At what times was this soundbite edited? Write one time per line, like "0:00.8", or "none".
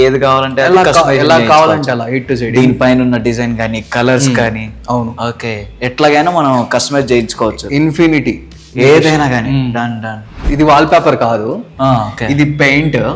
none